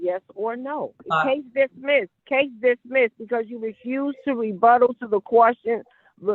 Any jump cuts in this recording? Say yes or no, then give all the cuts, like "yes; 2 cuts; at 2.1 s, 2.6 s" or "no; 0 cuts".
yes; 2 cuts; at 1.0 s, 2.2 s